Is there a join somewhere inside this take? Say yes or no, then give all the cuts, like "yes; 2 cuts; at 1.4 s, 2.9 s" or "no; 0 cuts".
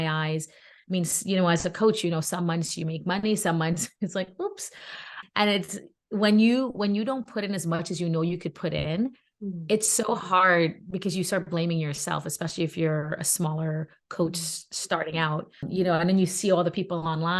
no; 0 cuts